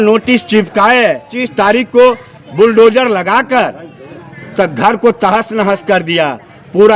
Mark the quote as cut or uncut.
cut